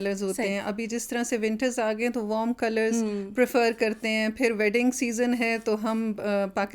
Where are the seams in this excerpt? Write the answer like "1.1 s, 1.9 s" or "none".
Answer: none